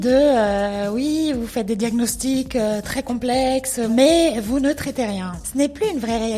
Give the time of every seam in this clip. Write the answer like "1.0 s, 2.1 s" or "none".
3.9 s, 5.4 s

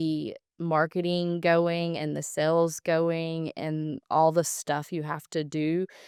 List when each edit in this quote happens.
none

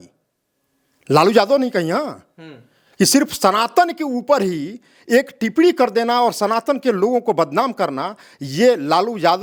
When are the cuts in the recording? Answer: none

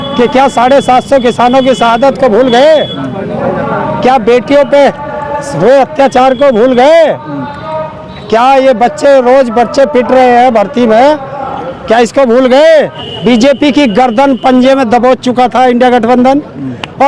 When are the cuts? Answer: 13.0 s

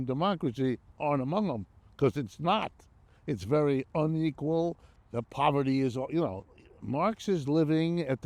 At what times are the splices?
4.9 s

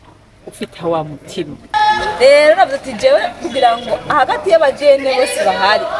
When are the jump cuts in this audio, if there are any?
1.7 s

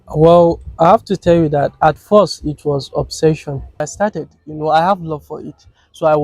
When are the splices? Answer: 3.8 s

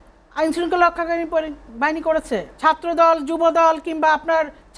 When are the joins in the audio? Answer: 2.5 s

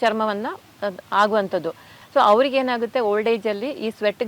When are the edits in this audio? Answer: 1.9 s

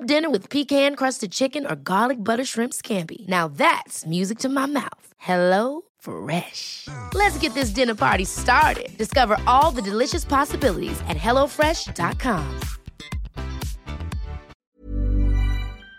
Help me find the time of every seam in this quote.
14.8 s

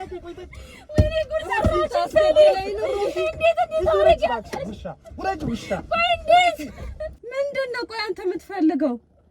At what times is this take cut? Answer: 7.3 s

